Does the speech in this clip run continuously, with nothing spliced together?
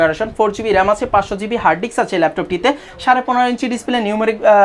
yes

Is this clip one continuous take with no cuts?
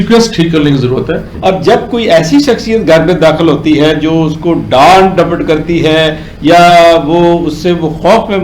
no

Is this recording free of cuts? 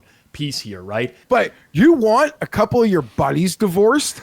no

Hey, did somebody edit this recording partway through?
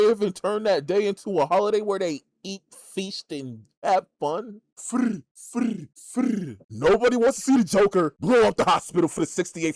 yes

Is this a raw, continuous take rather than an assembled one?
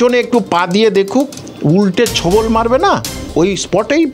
no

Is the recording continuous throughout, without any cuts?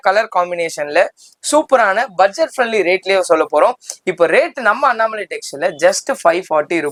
yes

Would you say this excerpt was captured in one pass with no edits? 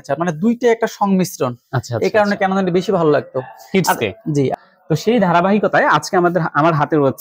no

